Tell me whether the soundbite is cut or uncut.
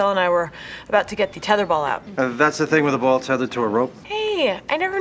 cut